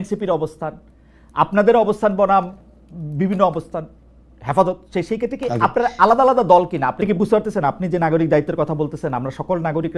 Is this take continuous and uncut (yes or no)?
no